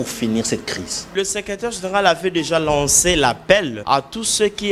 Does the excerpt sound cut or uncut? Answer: cut